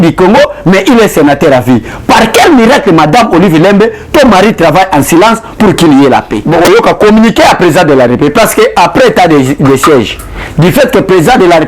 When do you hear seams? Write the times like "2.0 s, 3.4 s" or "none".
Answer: 6.4 s